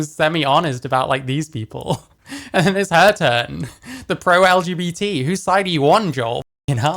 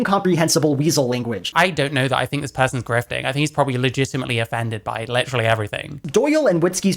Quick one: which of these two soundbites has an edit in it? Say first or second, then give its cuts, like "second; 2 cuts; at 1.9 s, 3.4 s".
second; 2 cuts; at 1.5 s, 6.0 s